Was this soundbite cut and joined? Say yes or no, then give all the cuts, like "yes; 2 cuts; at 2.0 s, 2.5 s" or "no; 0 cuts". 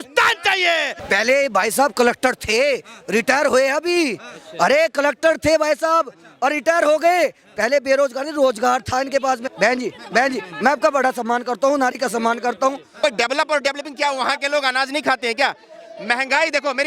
yes; 3 cuts; at 1.0 s, 9.5 s, 13.0 s